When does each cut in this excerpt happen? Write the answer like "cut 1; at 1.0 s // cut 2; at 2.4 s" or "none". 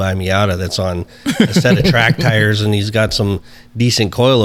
none